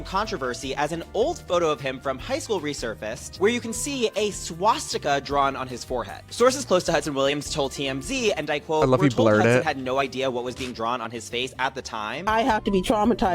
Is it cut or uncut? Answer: cut